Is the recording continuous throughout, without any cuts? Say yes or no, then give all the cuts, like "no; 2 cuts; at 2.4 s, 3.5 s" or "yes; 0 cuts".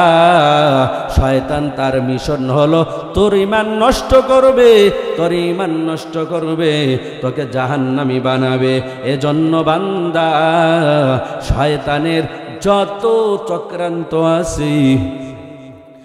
yes; 0 cuts